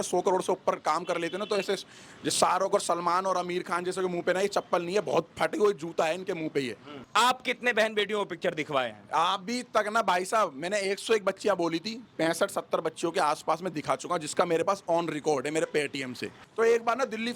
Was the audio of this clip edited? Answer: yes; 2 cuts; at 6.9 s, 16.4 s

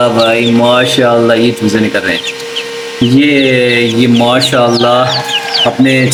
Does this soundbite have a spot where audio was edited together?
no; 0 cuts

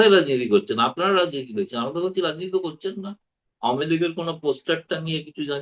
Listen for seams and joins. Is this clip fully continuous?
yes; 0 cuts

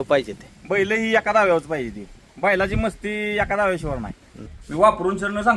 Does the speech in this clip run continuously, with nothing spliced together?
no; 1 cut; at 4.5 s

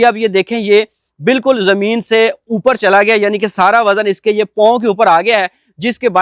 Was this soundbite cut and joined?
no; 0 cuts

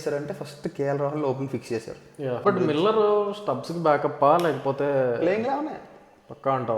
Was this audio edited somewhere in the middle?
yes; 1 cut; at 2.4 s

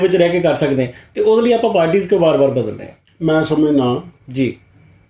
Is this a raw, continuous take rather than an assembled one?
yes; 0 cuts

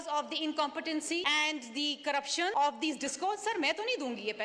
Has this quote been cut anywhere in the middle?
yes; 2 cuts; at 1.2 s, 2.5 s

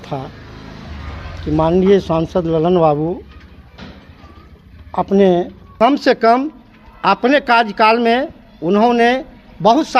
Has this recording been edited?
yes; 1 cut; at 5.6 s

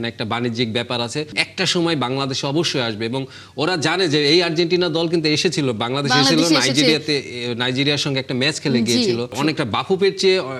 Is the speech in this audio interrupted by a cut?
yes; 2 cuts; at 1.4 s, 9.3 s

